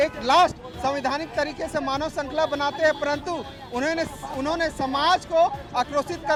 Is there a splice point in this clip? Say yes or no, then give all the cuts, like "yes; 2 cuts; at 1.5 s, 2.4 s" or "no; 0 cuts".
no; 0 cuts